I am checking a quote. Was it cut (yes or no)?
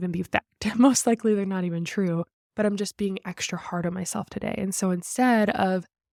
no